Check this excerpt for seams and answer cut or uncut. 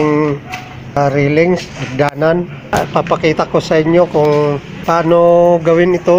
cut